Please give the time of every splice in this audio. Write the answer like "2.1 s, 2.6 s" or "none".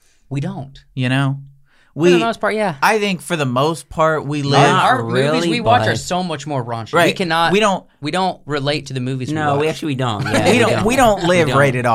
none